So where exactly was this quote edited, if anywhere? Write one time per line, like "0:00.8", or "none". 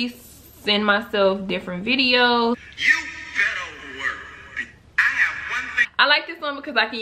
0:02.6
0:05.8